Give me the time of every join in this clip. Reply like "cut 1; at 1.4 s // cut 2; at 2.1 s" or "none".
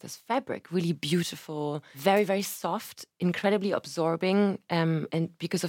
cut 1; at 2.0 s